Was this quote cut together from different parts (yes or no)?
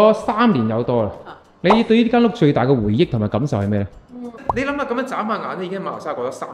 yes